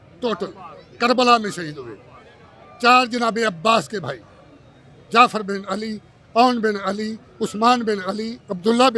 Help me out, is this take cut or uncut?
uncut